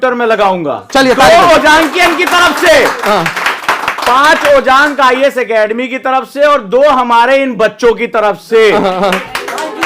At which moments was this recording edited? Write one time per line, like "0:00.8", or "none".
none